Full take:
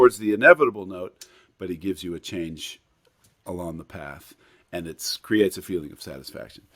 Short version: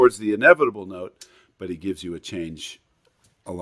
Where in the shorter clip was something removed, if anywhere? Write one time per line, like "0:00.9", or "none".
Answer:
none